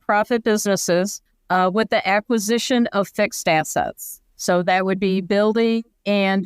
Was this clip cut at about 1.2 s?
yes; 1 cut; at 1.2 s

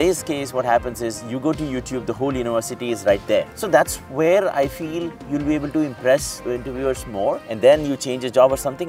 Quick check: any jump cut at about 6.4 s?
yes; 3 cuts; at 3.5 s, 6.4 s, 7.5 s

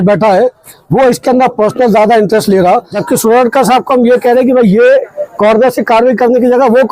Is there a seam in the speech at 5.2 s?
no; 1 cut; at 2.9 s

